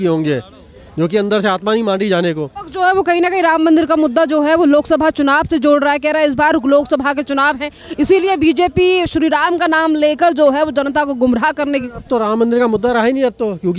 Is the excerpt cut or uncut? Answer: uncut